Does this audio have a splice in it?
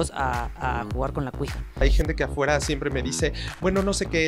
yes; 1 cut; at 1.7 s

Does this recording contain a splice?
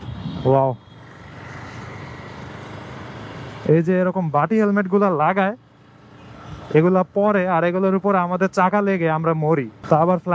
no; 0 cuts

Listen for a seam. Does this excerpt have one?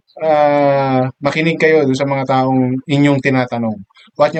no; 0 cuts

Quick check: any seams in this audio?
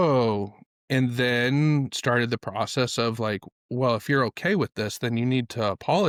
no; 0 cuts

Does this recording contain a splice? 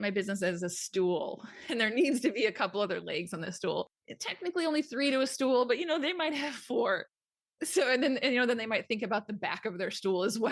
no; 0 cuts

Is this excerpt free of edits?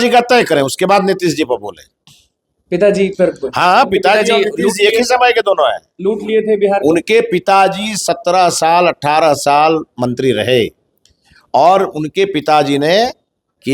yes; 0 cuts

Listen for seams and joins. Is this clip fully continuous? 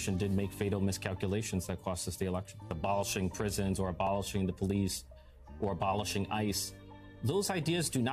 no; 1 cut; at 2.7 s

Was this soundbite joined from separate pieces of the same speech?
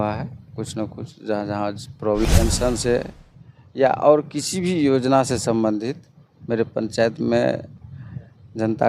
yes; 1 cut; at 2.3 s

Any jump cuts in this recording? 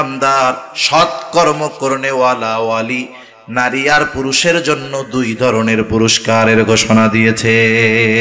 no; 0 cuts

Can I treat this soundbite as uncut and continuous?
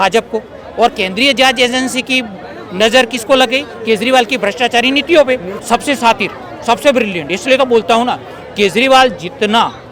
no; 1 cut; at 5.5 s

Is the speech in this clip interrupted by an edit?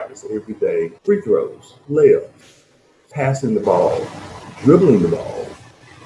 yes; 2 cuts; at 1.0 s, 1.7 s

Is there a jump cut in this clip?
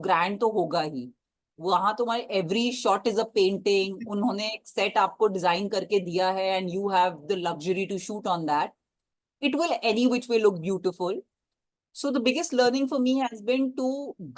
no; 0 cuts

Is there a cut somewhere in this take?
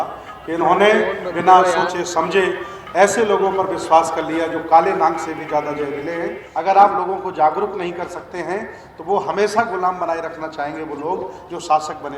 yes; 1 cut; at 6.4 s

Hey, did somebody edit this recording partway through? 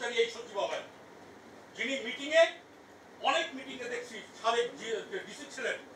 no; 0 cuts

